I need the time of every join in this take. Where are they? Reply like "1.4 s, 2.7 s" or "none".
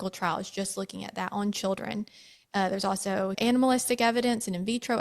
3.4 s